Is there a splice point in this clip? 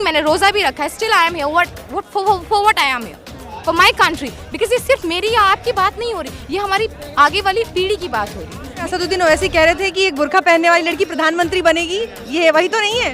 yes; 1 cut; at 8.9 s

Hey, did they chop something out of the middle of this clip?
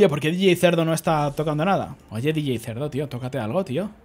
no; 0 cuts

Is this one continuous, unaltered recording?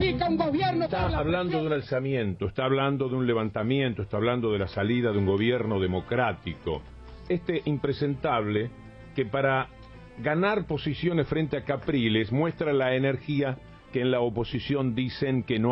yes; 0 cuts

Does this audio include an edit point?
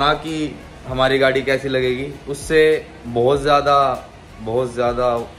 no; 0 cuts

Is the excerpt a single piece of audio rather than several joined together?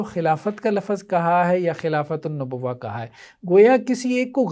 yes; 0 cuts

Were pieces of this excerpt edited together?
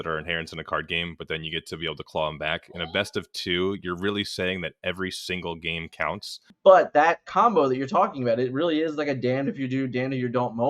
yes; 1 cut; at 6.5 s

